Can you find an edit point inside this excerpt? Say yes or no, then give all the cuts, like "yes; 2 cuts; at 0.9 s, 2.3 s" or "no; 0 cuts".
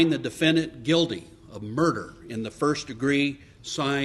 no; 0 cuts